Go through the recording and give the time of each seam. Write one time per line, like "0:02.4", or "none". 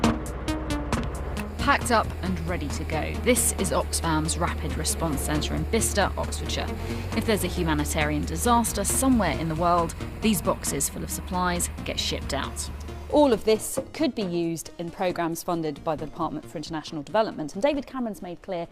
0:08.1